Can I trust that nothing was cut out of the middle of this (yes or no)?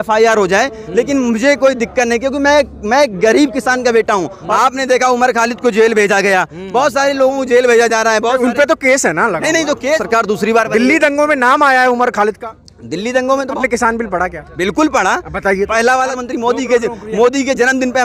no